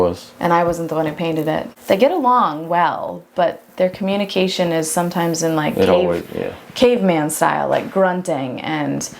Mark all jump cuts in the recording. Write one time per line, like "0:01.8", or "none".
0:01.7